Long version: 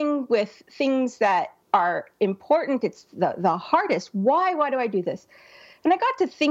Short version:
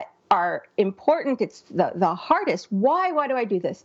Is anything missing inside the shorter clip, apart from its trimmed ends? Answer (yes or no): no